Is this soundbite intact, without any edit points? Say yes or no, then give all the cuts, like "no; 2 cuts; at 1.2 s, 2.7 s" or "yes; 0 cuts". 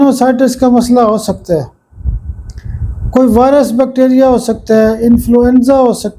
yes; 0 cuts